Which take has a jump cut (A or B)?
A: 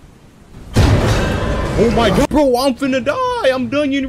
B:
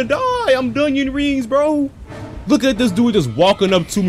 A